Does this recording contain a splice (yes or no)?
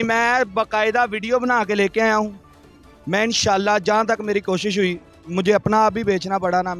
no